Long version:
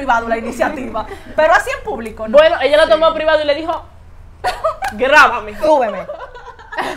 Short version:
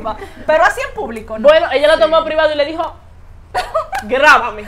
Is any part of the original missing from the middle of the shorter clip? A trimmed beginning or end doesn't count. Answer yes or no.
no